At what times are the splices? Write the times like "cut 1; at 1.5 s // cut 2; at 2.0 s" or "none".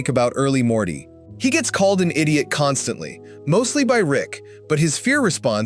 none

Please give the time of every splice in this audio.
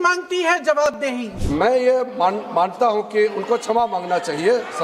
cut 1; at 1.3 s

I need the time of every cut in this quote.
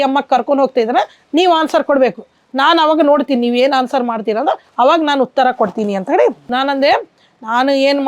cut 1; at 6.5 s

